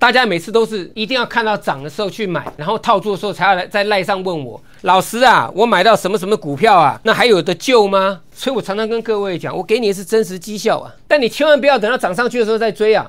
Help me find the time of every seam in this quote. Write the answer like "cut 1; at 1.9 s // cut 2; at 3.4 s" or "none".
cut 1; at 0.9 s // cut 2; at 2.6 s // cut 3; at 7.0 s // cut 4; at 8.3 s // cut 5; at 10.9 s